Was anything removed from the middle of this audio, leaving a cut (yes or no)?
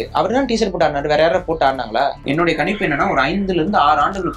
yes